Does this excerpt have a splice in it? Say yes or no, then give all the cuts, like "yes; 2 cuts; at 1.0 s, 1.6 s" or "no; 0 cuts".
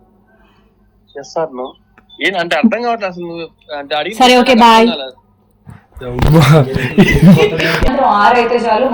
yes; 1 cut; at 7.8 s